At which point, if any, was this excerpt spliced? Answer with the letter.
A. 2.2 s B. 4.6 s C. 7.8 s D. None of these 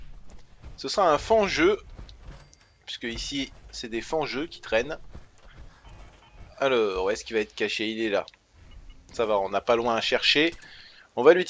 A